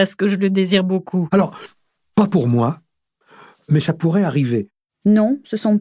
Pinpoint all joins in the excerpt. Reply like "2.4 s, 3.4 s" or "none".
1.3 s, 4.8 s